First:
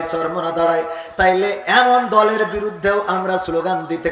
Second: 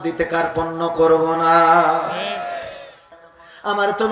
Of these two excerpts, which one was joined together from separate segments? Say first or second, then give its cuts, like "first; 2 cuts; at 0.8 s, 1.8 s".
second; 1 cut; at 3.1 s